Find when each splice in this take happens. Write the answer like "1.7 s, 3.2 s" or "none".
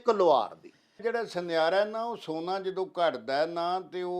1.0 s